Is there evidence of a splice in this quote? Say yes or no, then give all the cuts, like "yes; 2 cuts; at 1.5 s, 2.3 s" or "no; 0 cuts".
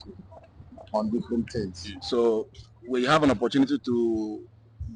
yes; 1 cut; at 1.9 s